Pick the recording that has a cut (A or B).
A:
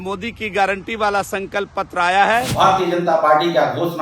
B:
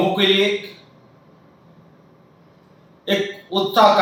A